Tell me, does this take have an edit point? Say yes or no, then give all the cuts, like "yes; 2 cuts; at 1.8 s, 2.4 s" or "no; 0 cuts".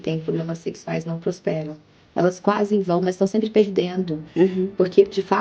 no; 0 cuts